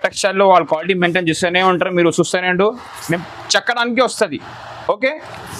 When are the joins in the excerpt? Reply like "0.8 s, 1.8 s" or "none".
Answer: 3.0 s